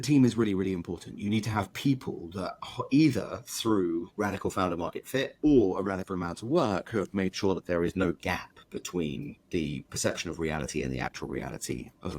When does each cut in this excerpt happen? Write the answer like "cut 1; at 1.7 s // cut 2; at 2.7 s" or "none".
none

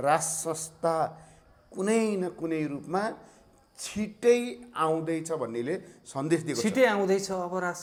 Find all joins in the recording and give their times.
none

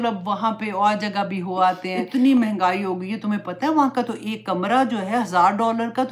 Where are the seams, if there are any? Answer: cut 1; at 1.9 s

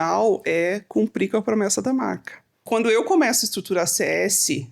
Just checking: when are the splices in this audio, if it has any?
cut 1; at 2.6 s

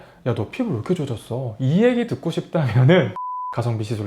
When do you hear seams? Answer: cut 1; at 3.1 s

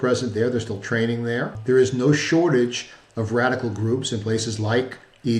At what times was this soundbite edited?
cut 1; at 1.6 s

